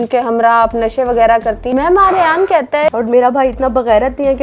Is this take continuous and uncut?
no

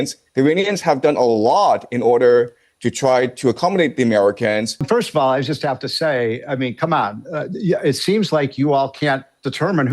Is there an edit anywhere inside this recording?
yes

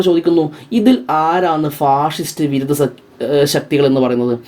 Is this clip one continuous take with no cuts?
yes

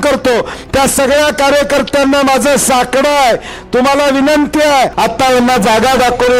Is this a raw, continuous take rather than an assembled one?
no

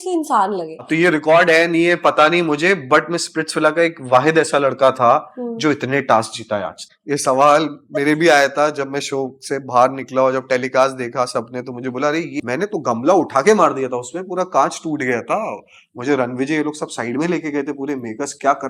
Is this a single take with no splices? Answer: no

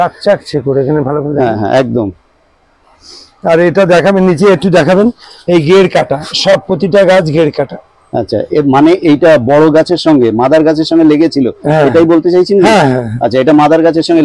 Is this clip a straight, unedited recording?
yes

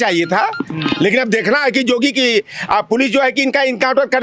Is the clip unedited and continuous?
yes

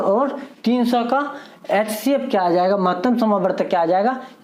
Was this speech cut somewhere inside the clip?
no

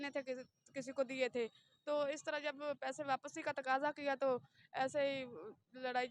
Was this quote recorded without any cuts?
yes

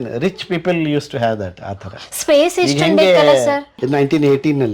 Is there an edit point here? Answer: yes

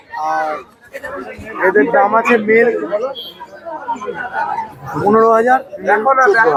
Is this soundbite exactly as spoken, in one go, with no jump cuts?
yes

